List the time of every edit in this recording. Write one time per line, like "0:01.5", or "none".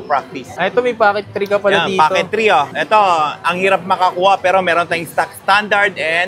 none

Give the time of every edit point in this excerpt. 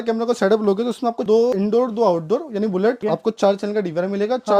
none

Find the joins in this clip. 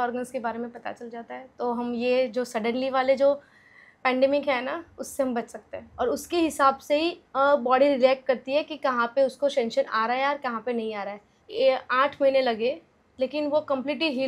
0:05.8
0:11.4

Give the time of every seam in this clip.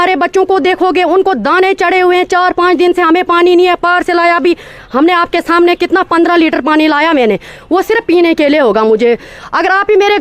none

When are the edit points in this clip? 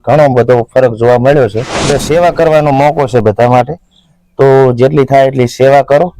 0:01.9

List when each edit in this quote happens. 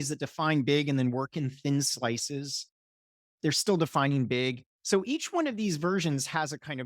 0:04.7

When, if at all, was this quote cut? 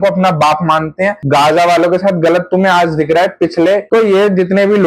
0:01.2
0:03.9

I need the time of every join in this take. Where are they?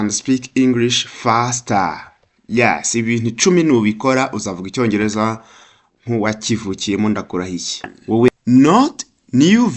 0:08.3

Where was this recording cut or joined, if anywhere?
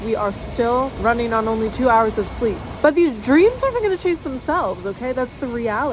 0:00.9
0:02.7

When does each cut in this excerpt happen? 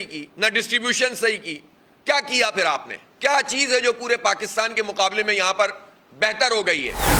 none

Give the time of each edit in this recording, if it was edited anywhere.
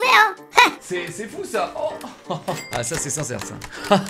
0:00.8
0:02.6

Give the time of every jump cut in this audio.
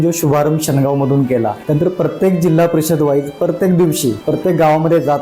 0:01.6
0:04.2

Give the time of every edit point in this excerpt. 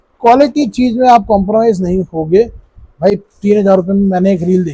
none

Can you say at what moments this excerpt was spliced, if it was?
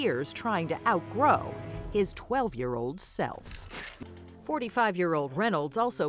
0:03.9

